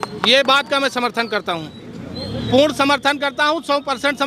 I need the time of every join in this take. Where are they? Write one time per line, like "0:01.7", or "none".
none